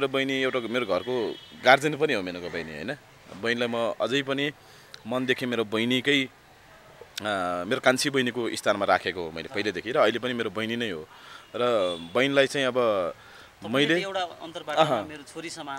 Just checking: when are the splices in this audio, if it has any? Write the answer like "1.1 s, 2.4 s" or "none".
none